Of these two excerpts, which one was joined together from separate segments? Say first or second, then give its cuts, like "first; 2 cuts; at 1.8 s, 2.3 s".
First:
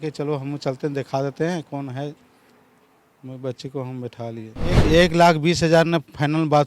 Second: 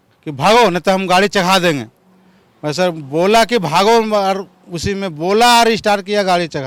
first; 1 cut; at 4.8 s